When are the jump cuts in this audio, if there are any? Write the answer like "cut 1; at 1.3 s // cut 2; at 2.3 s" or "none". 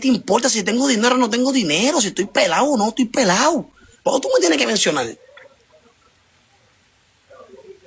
none